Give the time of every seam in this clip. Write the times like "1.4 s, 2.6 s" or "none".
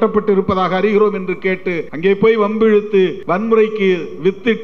1.8 s, 3.2 s

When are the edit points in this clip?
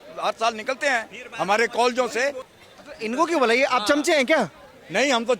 2.5 s

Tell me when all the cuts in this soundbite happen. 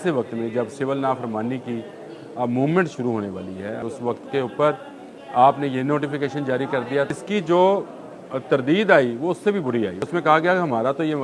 3.8 s, 7.1 s, 10.0 s

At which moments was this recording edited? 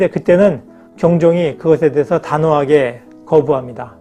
none

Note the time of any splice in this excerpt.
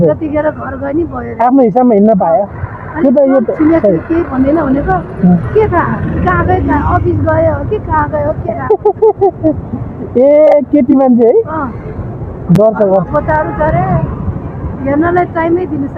none

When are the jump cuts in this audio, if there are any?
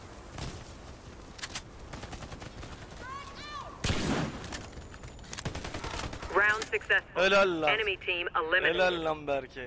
none

